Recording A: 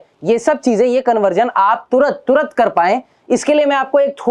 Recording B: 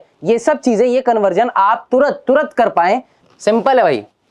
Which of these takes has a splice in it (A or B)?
B